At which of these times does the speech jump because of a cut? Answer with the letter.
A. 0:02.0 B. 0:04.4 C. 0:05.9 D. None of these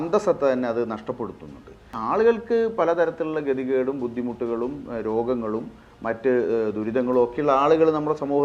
A